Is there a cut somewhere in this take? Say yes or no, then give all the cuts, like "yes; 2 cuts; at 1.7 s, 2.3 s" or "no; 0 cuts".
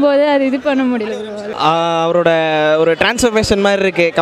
yes; 1 cut; at 1.5 s